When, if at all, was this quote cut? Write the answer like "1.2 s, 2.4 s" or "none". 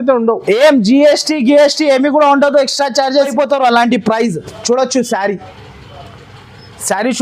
3.3 s